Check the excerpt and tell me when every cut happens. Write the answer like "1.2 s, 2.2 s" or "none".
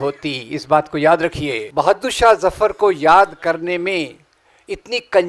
1.6 s